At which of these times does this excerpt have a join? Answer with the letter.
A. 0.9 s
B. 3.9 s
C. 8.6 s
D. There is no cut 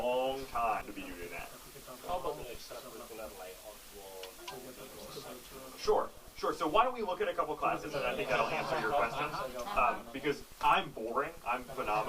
A